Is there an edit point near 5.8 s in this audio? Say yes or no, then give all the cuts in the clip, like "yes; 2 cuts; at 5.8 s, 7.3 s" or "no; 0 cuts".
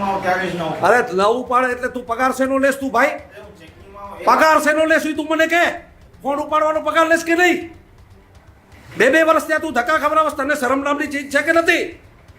no; 0 cuts